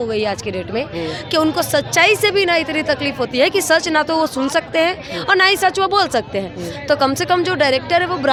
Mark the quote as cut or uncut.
uncut